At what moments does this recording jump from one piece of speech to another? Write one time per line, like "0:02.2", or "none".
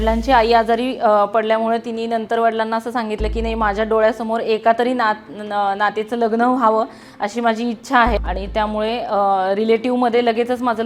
0:08.2